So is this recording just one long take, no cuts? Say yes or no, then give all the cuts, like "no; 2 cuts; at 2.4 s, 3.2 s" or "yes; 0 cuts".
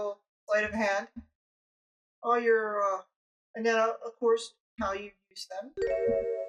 yes; 0 cuts